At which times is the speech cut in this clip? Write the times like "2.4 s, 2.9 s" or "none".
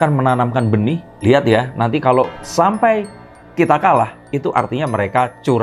none